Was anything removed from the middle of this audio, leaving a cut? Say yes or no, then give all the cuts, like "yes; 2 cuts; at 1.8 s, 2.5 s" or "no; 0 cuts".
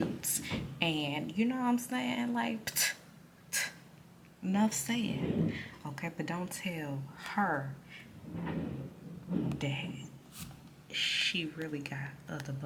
no; 0 cuts